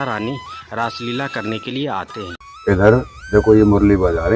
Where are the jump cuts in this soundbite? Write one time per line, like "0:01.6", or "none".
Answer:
0:02.4